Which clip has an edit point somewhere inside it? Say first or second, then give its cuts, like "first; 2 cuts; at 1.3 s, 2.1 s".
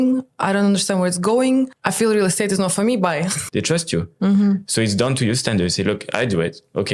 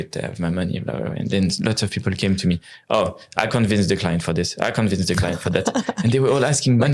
first; 2 cuts; at 1.8 s, 3.4 s